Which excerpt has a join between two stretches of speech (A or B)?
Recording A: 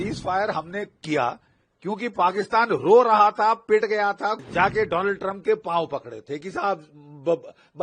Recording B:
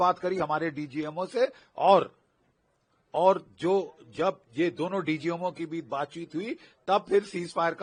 A